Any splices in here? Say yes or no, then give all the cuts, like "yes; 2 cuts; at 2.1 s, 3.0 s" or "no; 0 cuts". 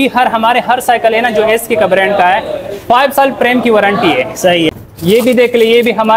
yes; 1 cut; at 4.7 s